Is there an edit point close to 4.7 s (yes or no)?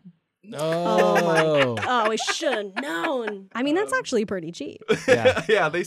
no